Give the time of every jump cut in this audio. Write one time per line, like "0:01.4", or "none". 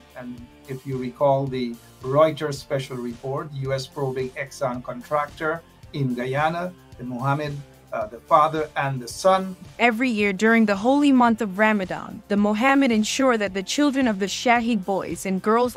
0:09.6